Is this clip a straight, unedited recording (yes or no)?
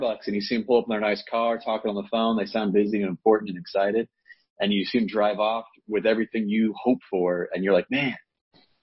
yes